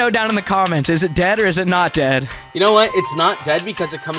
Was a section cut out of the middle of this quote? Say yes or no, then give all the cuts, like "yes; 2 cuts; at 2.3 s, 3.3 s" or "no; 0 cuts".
yes; 1 cut; at 2.4 s